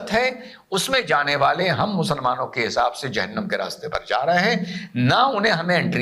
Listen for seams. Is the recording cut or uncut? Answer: uncut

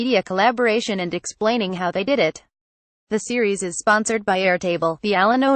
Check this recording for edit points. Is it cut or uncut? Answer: uncut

